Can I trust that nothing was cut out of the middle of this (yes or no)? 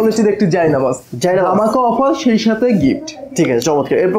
yes